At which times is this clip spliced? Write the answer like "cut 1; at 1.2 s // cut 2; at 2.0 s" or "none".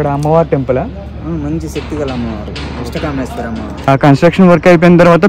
cut 1; at 3.9 s

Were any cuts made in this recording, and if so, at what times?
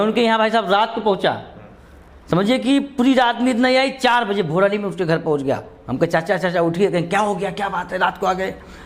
none

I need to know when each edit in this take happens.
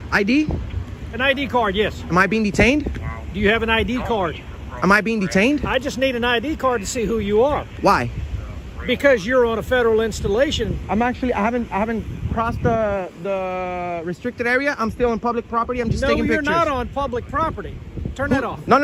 none

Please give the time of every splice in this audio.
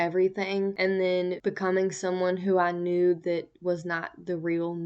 cut 1; at 0.8 s // cut 2; at 1.4 s

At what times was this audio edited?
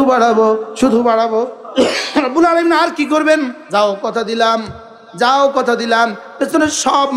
cut 1; at 1.6 s // cut 2; at 3.6 s

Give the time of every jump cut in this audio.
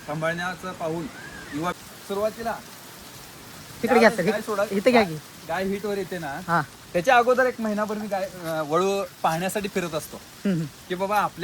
cut 1; at 1.8 s

